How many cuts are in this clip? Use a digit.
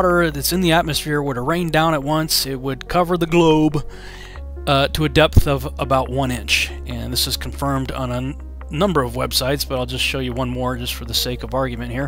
0